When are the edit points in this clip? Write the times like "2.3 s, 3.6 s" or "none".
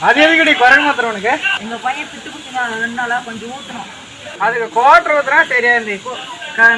1.5 s, 4.2 s